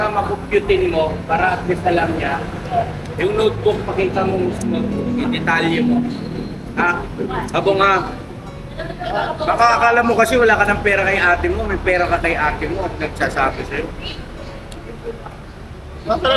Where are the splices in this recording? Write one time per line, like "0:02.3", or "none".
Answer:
none